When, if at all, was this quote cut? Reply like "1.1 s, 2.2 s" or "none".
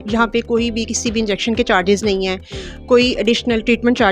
none